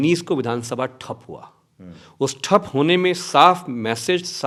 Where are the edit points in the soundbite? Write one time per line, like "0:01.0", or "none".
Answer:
none